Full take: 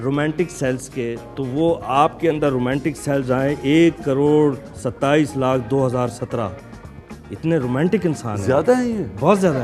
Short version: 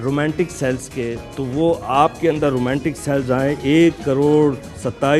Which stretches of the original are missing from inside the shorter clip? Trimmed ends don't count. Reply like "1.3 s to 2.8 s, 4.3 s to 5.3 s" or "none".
none